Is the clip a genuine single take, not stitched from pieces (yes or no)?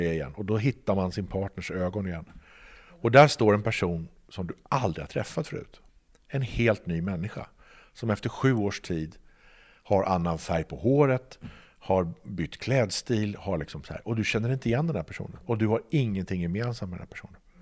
no